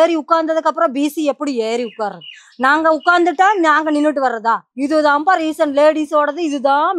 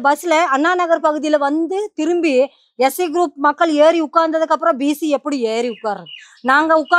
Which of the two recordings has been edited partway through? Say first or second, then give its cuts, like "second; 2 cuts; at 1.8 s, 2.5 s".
first; 1 cut; at 4.7 s